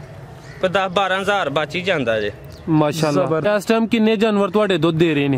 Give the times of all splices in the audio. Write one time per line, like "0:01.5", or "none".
0:03.5